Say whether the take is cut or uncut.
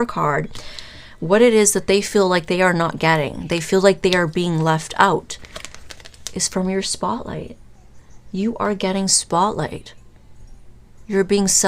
uncut